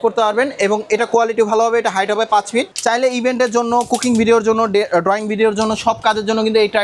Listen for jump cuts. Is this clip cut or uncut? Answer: cut